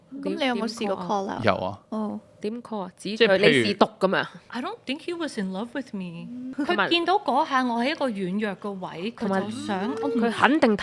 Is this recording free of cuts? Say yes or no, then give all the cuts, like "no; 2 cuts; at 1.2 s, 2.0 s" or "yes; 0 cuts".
no; 1 cut; at 4.3 s